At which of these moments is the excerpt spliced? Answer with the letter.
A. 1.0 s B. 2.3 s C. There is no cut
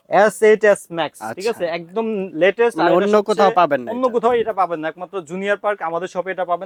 C